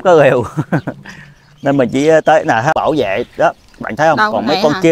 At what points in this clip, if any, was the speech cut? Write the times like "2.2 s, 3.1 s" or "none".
2.7 s